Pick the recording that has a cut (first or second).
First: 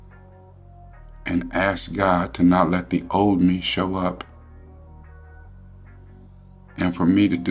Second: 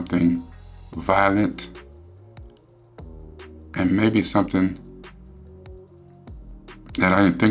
second